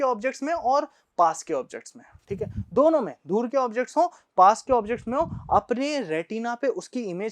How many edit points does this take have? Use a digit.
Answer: 0